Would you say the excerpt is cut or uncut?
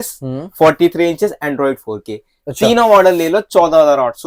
uncut